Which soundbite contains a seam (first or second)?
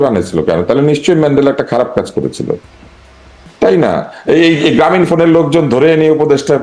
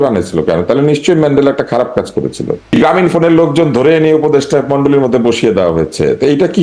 second